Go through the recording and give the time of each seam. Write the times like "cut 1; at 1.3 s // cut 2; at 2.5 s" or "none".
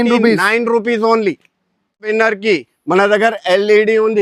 cut 1; at 2.1 s